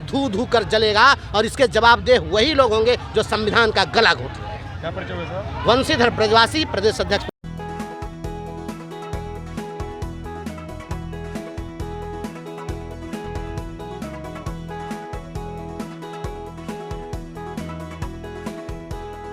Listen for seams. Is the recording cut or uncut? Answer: uncut